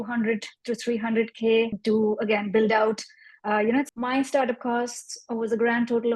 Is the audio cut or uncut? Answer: cut